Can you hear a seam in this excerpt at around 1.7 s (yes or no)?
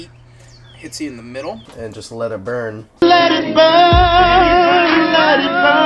yes